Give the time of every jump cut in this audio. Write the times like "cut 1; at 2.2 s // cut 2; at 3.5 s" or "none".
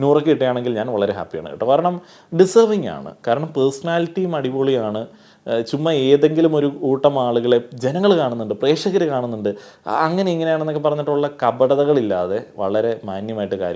none